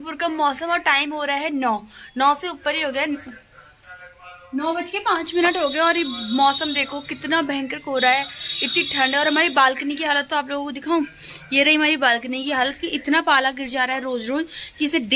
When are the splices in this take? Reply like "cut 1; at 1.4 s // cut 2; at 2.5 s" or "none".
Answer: none